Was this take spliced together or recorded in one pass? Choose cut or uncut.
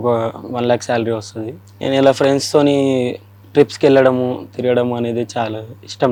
uncut